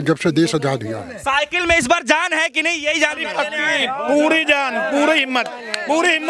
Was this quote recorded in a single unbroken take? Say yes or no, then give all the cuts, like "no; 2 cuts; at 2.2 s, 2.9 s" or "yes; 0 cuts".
no; 1 cut; at 1.1 s